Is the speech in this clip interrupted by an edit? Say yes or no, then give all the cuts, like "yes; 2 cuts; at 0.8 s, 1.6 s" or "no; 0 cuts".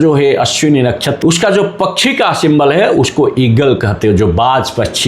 yes; 1 cut; at 1.1 s